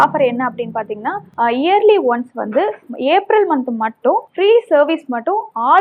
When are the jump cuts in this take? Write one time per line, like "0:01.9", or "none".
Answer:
none